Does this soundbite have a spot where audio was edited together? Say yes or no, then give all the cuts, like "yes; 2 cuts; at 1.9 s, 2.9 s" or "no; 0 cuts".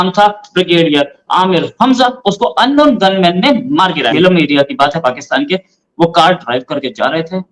yes; 1 cut; at 4.1 s